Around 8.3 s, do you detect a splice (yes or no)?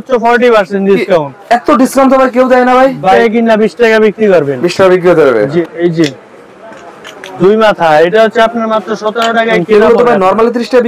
no